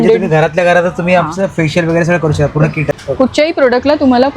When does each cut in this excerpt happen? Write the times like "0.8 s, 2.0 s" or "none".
3.0 s